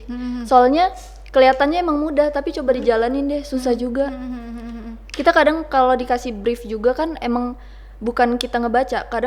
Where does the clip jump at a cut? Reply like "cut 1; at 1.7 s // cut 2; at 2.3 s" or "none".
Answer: none